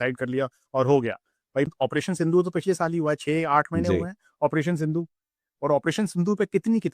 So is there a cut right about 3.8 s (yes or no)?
no